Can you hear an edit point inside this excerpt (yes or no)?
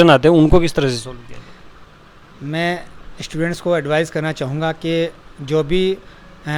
no